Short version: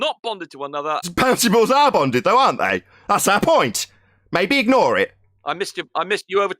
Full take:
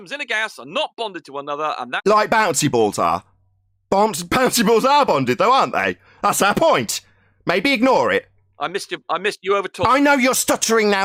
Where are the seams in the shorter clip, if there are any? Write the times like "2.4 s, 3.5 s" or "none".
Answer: 1.1 s